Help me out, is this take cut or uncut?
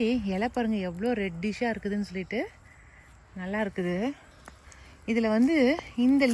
uncut